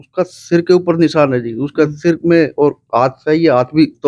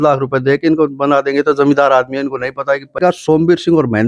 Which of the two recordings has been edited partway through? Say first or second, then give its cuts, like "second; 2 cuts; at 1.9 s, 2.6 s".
second; 1 cut; at 3.0 s